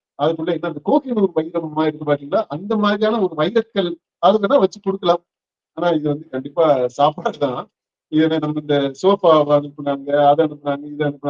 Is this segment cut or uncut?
uncut